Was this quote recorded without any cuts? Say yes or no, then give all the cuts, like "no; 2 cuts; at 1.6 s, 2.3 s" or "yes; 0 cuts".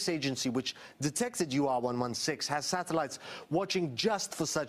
no; 1 cut; at 3.1 s